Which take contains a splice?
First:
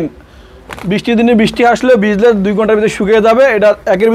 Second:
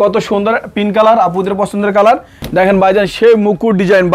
second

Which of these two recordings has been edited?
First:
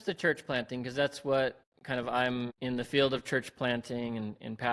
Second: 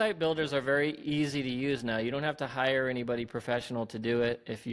first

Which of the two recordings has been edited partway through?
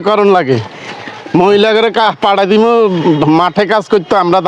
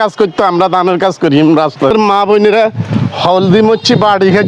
second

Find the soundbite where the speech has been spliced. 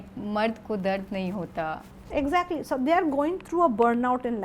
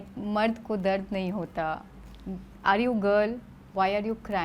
first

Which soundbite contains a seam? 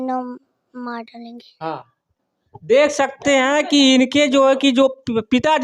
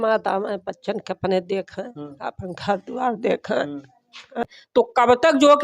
second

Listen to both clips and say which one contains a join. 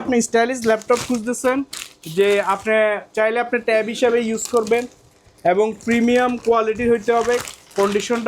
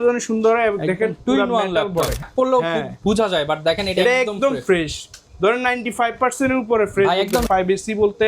second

